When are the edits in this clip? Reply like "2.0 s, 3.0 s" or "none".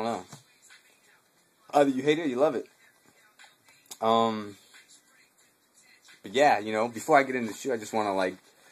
6.3 s